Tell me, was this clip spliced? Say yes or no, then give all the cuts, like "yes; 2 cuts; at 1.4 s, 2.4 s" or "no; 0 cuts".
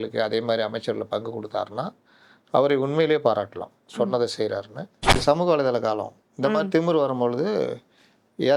yes; 1 cut; at 5.2 s